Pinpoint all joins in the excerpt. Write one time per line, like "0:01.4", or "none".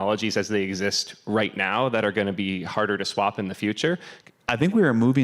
0:04.1